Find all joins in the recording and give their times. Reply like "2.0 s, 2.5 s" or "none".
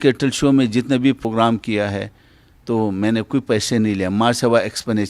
1.2 s